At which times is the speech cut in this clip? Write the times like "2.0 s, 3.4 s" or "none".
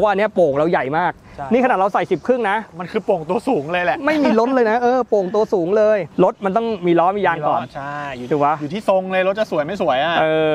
6.1 s